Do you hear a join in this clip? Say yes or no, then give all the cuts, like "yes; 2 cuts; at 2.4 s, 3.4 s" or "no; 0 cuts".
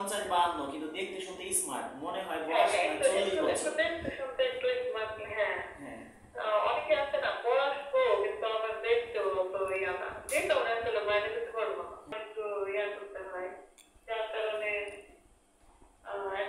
yes; 1 cut; at 12.1 s